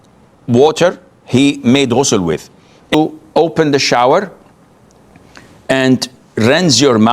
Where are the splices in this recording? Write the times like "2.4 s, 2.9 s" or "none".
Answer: 2.9 s